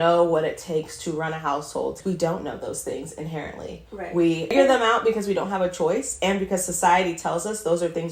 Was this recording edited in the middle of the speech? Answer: yes; 2 cuts; at 2.0 s, 4.5 s

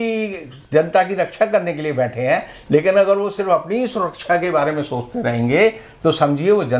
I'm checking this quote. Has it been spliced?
no; 0 cuts

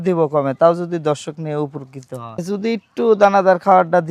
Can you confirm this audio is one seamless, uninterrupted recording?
no; 1 cut; at 2.4 s

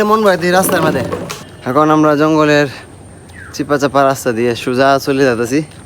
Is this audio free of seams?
no; 1 cut; at 1.6 s

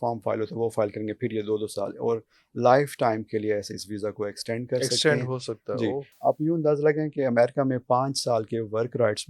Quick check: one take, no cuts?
no; 1 cut; at 6.1 s

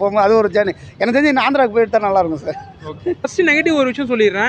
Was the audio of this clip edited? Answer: yes; 1 cut; at 3.3 s

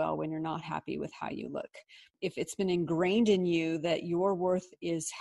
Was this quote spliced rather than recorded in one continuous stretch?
yes; 1 cut; at 2.1 s

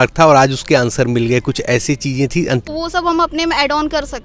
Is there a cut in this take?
yes; 1 cut; at 2.7 s

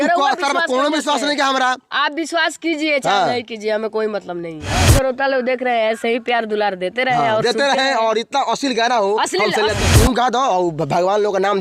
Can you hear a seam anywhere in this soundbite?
yes; 2 cuts; at 4.8 s, 9.9 s

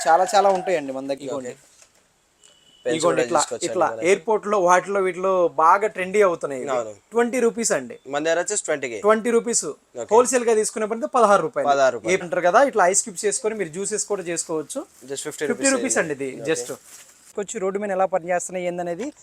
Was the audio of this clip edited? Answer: yes; 3 cuts; at 1.2 s, 12.2 s, 17.2 s

